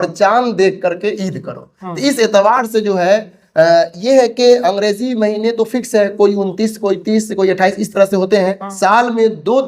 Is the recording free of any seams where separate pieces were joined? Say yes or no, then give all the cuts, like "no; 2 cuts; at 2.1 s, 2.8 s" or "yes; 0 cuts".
no; 1 cut; at 8.6 s